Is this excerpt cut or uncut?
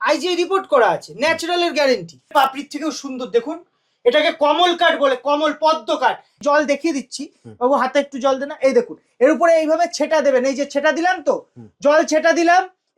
cut